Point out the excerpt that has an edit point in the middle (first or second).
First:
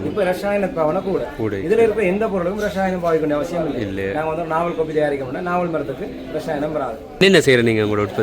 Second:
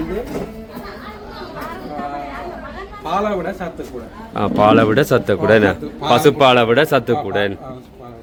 first